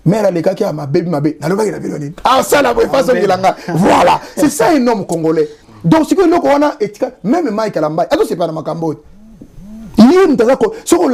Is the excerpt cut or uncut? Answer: uncut